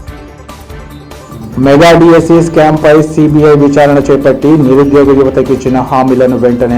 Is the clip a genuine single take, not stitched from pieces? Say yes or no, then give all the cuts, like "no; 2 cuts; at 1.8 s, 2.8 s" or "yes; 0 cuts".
no; 1 cut; at 0.9 s